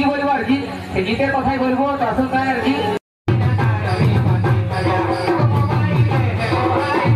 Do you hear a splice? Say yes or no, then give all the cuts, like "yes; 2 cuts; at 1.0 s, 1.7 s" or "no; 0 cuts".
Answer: no; 0 cuts